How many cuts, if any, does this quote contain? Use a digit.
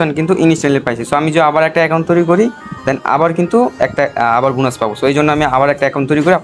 0